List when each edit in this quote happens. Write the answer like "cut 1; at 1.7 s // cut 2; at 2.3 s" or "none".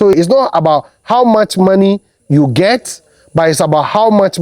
none